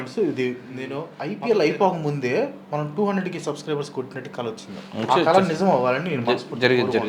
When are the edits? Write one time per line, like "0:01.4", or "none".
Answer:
0:01.1